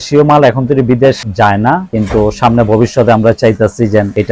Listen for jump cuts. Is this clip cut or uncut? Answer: uncut